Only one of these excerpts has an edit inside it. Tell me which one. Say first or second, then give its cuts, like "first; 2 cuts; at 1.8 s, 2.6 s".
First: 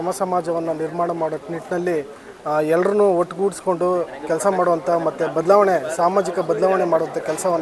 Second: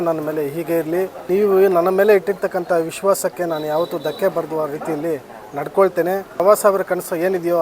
second; 2 cuts; at 1.3 s, 6.4 s